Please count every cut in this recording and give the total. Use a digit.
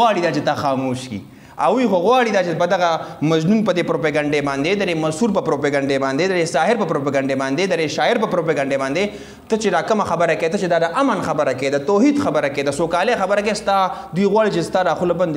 0